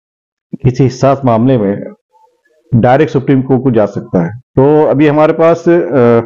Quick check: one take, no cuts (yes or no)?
no